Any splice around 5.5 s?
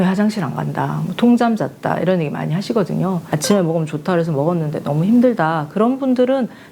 no; 1 cut; at 3.2 s

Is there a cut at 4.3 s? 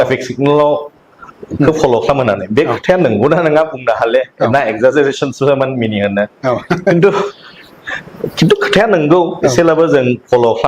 yes; 1 cut; at 4.3 s

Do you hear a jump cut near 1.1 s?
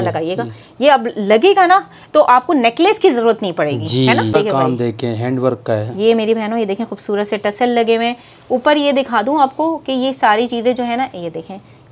no; 1 cut; at 4.3 s

